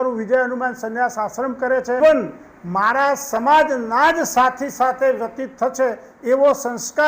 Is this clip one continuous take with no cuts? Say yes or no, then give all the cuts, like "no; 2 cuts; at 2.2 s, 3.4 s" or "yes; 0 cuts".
no; 1 cut; at 2.0 s